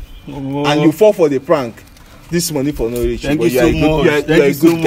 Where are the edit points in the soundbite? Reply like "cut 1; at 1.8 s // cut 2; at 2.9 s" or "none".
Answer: none